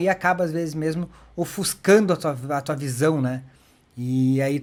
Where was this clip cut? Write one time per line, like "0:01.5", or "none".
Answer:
none